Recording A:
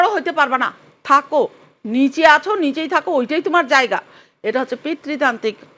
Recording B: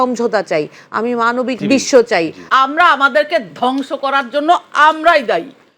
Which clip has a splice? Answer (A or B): B